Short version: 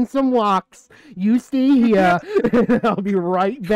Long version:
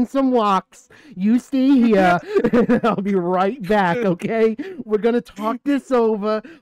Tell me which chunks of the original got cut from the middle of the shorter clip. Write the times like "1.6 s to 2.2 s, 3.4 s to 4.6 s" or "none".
none